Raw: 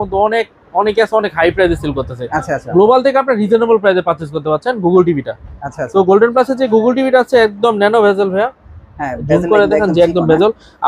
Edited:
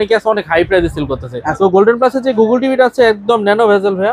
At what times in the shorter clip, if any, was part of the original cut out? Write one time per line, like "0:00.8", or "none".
0:01.4